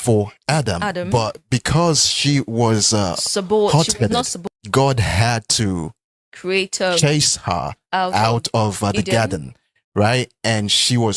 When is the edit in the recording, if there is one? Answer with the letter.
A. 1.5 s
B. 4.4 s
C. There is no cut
B